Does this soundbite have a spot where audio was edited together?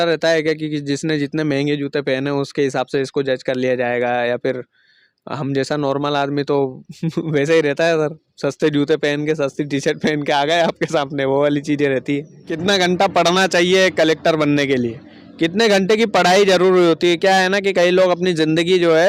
yes; 1 cut; at 12.5 s

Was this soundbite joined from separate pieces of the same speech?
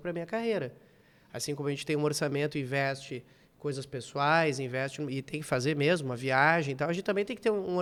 no; 0 cuts

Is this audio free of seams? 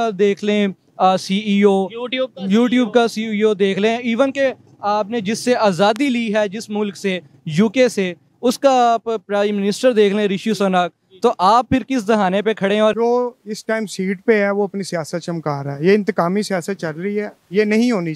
no; 1 cut; at 13.0 s

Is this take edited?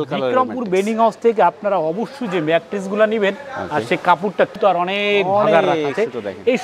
yes; 1 cut; at 4.5 s

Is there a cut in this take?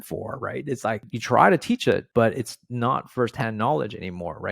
yes; 2 cuts; at 1.1 s, 2.1 s

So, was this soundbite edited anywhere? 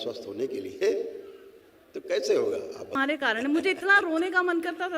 yes; 1 cut; at 3.0 s

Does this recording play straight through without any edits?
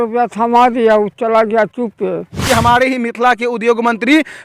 no; 1 cut; at 2.4 s

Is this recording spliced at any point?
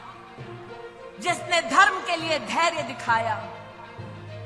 no; 0 cuts

